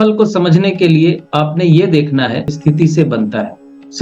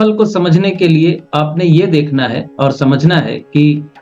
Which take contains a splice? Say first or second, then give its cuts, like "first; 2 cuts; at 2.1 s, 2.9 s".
first; 1 cut; at 2.5 s